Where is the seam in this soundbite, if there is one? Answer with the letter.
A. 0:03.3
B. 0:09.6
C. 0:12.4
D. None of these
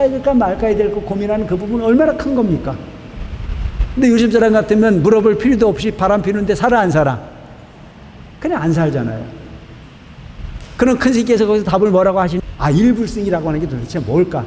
C